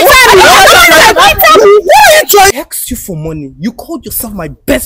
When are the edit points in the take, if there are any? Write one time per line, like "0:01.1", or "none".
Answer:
0:02.5